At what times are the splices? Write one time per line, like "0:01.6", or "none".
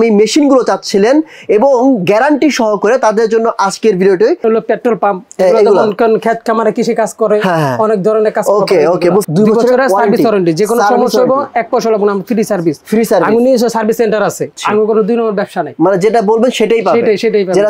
0:04.4
0:09.3
0:14.6